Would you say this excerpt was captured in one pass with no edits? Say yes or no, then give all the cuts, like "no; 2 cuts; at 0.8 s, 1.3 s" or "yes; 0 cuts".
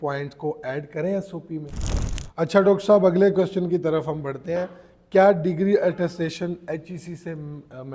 no; 1 cut; at 1.8 s